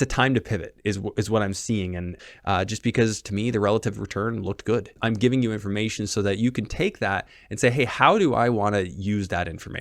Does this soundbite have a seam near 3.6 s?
no; 2 cuts; at 2.1 s, 5.0 s

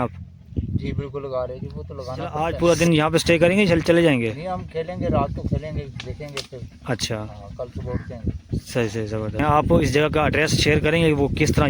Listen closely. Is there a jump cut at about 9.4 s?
yes; 2 cuts; at 2.4 s, 9.4 s

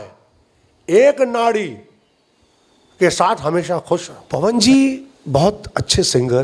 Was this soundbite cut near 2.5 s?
no; 1 cut; at 4.2 s

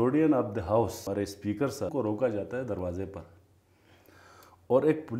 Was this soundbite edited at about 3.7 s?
no; 2 cuts; at 1.1 s, 1.9 s

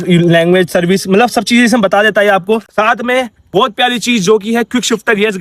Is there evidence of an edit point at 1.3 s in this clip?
no; 1 cut; at 2.7 s

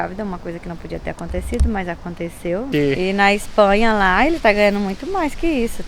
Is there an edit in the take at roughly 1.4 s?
no; 1 cut; at 2.7 s

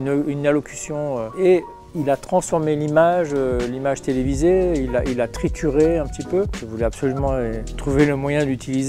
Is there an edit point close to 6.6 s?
yes; 3 cuts; at 1.4 s, 6.6 s, 7.7 s

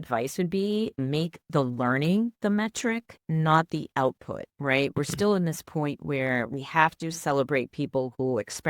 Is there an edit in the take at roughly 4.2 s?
no; 1 cut; at 1.0 s

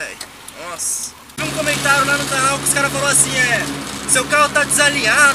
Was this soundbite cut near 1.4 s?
yes; 1 cut; at 1.4 s

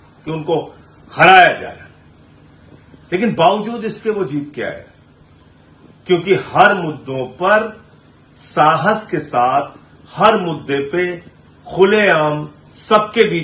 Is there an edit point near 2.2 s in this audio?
no; 0 cuts

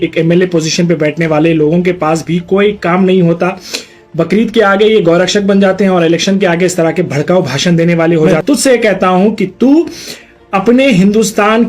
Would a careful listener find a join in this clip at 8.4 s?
yes; 1 cut; at 8.4 s

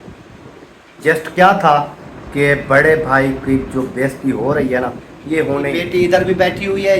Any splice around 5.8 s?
yes; 1 cut; at 5.8 s

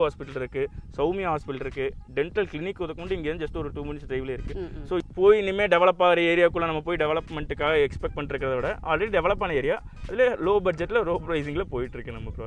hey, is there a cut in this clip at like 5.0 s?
yes; 1 cut; at 5.0 s

